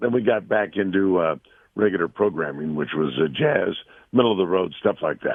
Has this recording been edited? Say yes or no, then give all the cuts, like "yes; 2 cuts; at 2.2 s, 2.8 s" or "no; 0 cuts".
no; 0 cuts